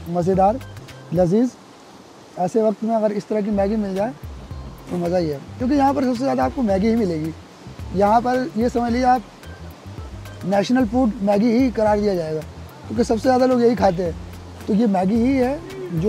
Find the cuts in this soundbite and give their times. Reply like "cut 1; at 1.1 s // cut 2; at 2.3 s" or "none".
none